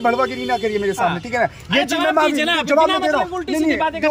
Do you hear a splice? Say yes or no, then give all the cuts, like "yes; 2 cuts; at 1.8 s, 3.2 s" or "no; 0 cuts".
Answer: no; 0 cuts